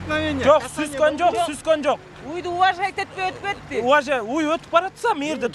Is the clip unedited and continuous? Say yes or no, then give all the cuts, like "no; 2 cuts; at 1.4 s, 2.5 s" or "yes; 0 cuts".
yes; 0 cuts